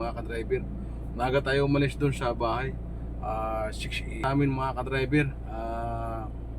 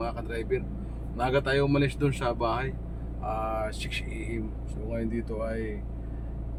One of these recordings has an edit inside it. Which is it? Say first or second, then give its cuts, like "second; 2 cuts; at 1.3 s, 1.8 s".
first; 1 cut; at 4.2 s